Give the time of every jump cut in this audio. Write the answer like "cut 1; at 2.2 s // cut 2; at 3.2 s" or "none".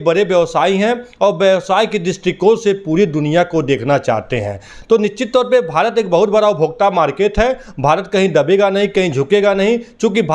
none